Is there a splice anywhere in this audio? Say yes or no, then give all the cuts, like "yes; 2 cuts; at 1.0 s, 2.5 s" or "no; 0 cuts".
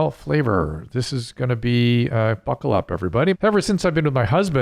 yes; 1 cut; at 3.3 s